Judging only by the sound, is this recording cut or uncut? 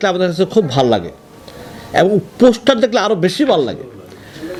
uncut